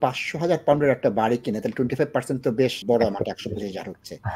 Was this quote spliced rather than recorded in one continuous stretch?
yes; 1 cut; at 2.8 s

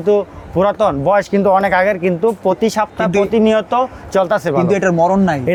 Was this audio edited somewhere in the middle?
no; 0 cuts

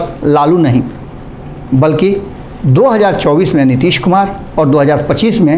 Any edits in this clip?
no; 0 cuts

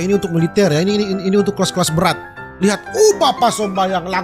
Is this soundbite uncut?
yes; 0 cuts

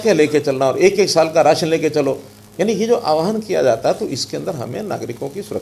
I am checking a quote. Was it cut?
no; 0 cuts

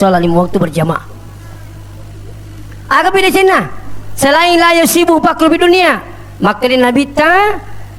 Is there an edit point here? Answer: no; 0 cuts

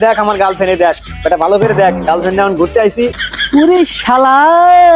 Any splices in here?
yes; 1 cut; at 3.2 s

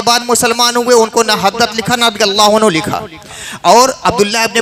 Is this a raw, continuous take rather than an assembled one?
yes; 0 cuts

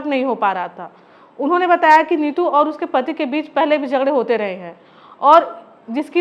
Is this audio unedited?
yes; 0 cuts

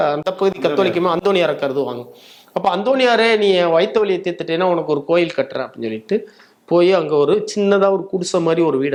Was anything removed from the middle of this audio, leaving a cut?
no; 0 cuts

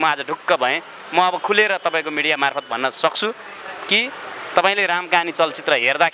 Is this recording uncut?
yes; 0 cuts

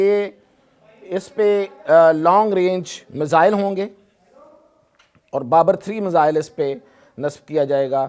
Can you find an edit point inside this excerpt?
no; 0 cuts

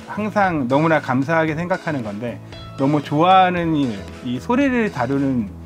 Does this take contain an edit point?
no; 0 cuts

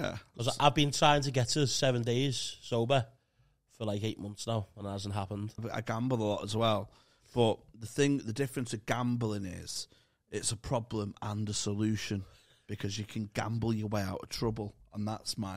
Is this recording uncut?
no; 1 cut; at 5.6 s

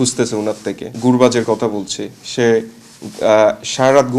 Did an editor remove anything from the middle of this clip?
yes; 1 cut; at 0.9 s

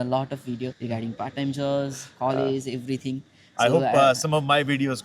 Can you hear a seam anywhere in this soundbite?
no; 0 cuts

